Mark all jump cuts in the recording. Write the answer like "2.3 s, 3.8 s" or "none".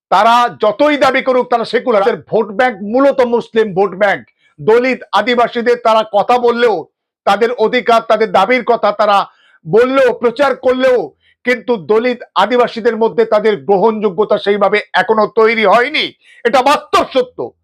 2.0 s